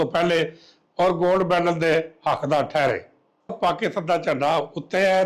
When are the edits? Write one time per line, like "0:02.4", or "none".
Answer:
0:03.6